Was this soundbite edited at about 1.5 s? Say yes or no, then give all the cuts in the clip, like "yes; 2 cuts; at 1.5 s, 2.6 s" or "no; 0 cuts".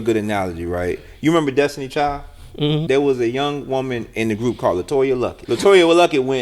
no; 2 cuts; at 2.8 s, 5.4 s